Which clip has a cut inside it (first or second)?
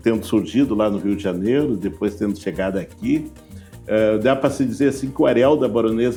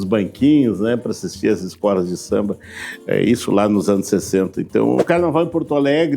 second